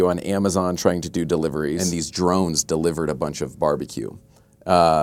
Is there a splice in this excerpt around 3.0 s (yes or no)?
no